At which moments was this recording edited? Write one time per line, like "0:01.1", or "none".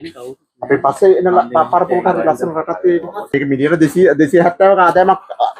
0:03.2